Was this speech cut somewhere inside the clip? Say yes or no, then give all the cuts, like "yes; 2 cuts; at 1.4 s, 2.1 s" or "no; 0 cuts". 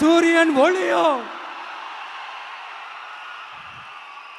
no; 0 cuts